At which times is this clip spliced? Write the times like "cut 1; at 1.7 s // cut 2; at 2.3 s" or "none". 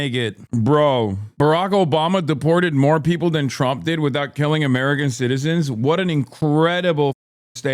cut 1; at 6.3 s